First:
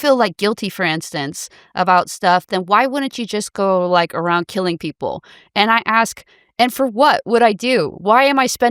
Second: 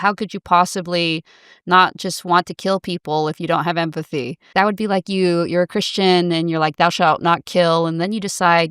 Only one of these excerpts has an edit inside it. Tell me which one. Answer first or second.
second